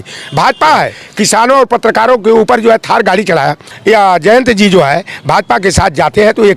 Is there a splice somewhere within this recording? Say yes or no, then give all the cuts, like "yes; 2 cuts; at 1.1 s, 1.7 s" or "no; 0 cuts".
yes; 2 cuts; at 1.0 s, 3.7 s